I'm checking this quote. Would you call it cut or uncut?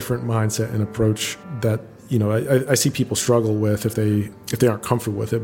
cut